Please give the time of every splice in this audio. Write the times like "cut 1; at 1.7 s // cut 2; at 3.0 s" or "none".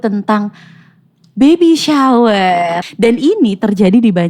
cut 1; at 2.8 s